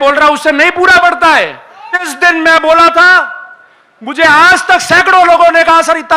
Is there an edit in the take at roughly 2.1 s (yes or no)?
yes